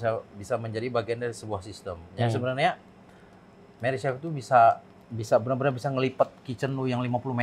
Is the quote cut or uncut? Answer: uncut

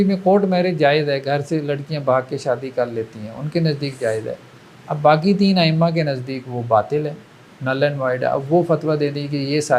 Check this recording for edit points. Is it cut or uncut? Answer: uncut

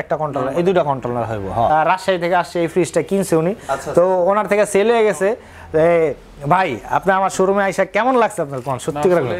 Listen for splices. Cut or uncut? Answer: cut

